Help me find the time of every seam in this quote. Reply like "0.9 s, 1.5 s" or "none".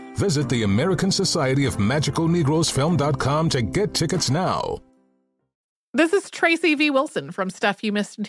5.5 s